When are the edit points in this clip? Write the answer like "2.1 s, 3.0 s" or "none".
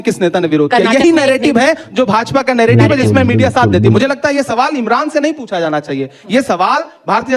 4.0 s